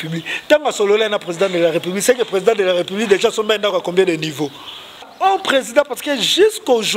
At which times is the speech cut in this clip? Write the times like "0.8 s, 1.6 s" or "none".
5.1 s